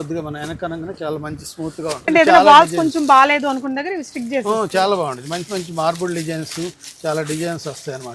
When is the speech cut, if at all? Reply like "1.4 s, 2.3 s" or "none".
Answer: 2.1 s